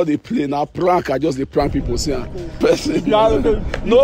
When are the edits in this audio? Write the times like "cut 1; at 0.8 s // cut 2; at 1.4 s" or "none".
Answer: cut 1; at 2.6 s